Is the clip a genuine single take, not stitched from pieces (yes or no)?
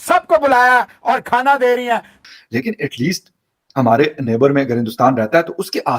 no